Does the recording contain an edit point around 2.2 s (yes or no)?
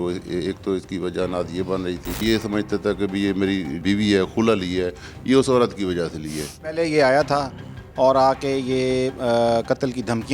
yes